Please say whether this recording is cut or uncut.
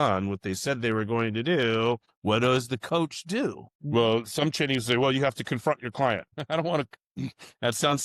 uncut